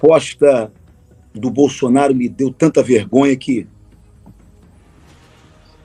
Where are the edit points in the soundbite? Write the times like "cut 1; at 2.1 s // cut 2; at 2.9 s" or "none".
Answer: none